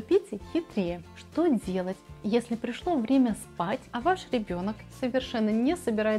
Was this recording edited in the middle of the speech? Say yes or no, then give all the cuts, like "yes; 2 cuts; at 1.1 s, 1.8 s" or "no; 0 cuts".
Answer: yes; 1 cut; at 1.0 s